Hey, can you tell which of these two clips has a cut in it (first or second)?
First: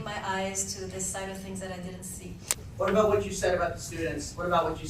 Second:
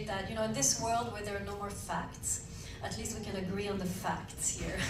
first